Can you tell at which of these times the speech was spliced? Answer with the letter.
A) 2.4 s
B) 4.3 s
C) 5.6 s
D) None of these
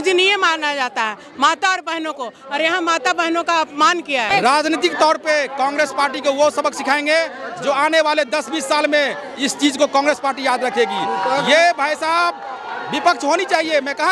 B